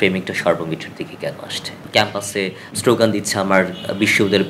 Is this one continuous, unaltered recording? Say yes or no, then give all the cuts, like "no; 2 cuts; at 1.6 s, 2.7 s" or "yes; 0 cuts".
no; 1 cut; at 1.8 s